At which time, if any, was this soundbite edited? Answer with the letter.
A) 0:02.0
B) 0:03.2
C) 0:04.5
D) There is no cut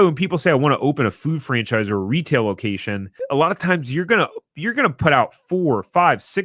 B